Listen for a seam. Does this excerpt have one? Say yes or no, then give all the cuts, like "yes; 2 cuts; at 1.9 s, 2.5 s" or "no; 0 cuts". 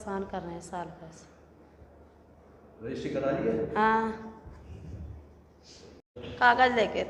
no; 0 cuts